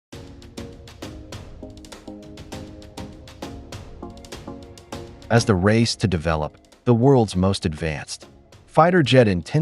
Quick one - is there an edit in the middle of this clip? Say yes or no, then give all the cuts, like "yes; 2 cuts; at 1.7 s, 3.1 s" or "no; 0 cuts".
yes; 1 cut; at 1.0 s